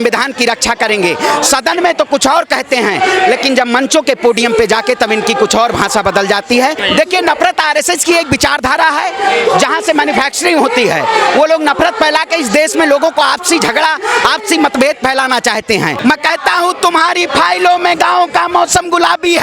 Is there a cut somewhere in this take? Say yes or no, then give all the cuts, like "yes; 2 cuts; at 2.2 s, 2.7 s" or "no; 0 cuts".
yes; 2 cuts; at 6.8 s, 15.9 s